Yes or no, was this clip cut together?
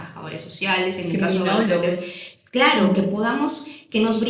no